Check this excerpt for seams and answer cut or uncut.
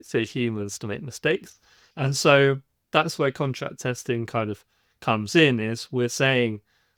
uncut